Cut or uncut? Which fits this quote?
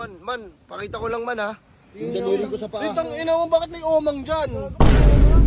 uncut